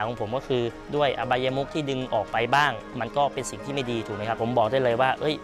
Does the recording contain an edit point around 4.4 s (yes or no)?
yes